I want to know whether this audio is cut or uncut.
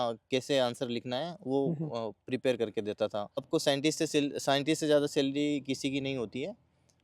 cut